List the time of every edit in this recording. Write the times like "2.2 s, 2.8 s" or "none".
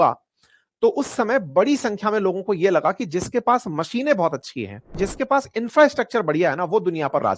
5.0 s

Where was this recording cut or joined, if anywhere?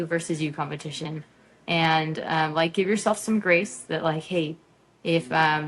none

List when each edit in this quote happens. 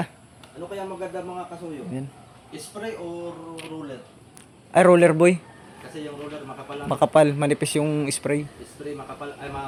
none

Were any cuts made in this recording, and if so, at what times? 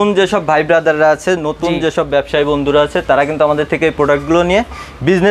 none

